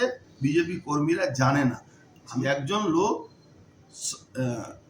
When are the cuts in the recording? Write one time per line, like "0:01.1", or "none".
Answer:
0:02.3